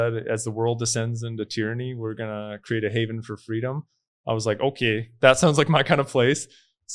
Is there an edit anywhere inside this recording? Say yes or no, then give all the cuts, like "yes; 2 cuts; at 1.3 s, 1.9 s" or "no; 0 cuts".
no; 0 cuts